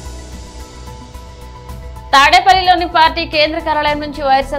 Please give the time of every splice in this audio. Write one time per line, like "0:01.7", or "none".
0:01.2
0:02.1